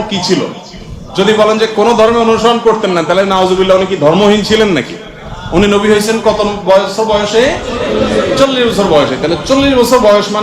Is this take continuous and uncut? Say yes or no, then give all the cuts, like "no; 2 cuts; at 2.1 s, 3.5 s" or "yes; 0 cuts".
yes; 0 cuts